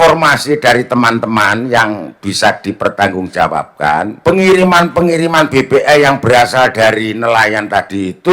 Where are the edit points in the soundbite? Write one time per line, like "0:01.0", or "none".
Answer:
0:04.1

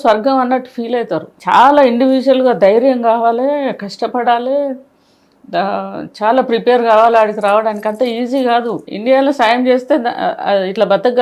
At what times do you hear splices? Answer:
0:01.3
0:08.9

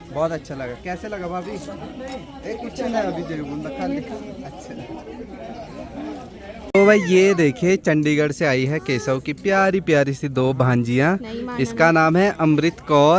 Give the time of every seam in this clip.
none

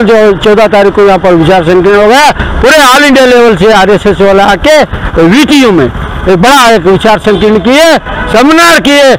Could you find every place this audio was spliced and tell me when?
none

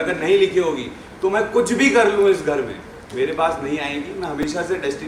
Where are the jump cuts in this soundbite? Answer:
none

